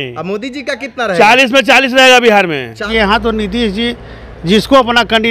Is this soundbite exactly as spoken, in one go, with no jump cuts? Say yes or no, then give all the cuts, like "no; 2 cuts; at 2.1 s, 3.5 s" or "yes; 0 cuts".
no; 1 cut; at 2.9 s